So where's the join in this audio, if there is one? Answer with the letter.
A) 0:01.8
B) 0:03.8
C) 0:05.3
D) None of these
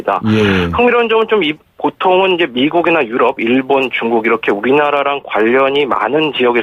C